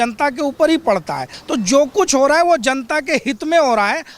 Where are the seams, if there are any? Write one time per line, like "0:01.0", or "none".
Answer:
0:01.3